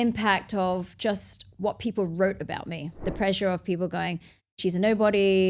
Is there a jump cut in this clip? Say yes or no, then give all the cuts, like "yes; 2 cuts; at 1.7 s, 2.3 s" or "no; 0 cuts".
yes; 1 cut; at 3.0 s